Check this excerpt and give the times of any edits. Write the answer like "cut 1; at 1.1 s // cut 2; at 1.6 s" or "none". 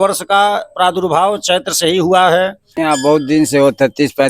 cut 1; at 2.7 s